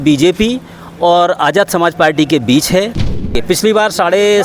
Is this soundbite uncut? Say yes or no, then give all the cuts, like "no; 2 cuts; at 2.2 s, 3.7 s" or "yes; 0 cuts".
no; 1 cut; at 3.3 s